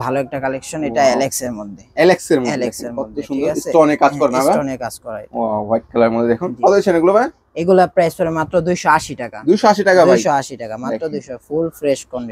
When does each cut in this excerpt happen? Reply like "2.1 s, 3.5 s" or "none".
none